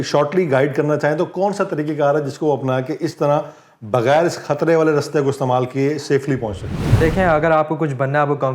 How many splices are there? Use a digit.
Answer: 1